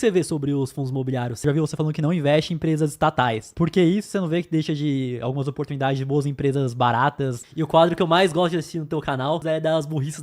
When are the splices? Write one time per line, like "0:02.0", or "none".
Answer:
0:01.4
0:03.5
0:07.4
0:09.4